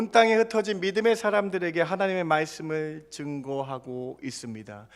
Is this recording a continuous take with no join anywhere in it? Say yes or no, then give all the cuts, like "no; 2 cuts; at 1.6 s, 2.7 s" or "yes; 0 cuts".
yes; 0 cuts